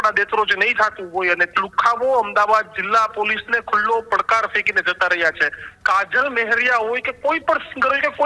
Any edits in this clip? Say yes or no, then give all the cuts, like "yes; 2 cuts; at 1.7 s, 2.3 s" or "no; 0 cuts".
yes; 2 cuts; at 1.5 s, 5.7 s